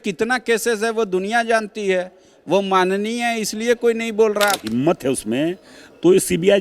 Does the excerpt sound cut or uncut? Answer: cut